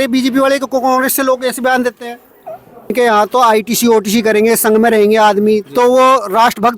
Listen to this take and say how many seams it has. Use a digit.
1